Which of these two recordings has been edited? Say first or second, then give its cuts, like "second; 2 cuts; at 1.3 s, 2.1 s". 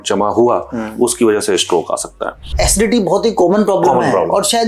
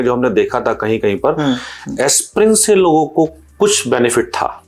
first; 1 cut; at 2.5 s